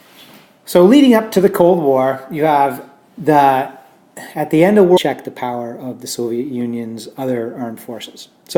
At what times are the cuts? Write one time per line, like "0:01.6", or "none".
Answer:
none